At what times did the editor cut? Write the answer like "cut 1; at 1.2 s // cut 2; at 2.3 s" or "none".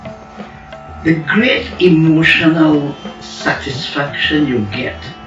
cut 1; at 1.0 s